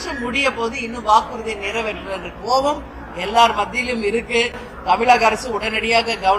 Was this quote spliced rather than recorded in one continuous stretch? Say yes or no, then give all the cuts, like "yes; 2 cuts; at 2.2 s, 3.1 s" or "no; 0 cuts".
no; 0 cuts